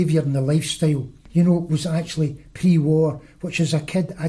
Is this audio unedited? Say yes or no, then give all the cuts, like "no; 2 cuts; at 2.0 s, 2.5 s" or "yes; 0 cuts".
no; 1 cut; at 1.1 s